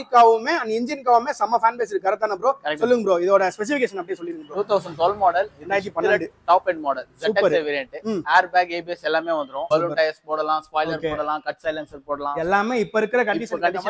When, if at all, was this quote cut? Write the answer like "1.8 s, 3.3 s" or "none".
9.7 s